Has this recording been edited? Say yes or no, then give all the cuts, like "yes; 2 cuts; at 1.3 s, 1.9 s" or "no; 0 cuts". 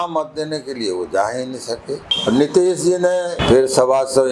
yes; 2 cuts; at 2.1 s, 3.3 s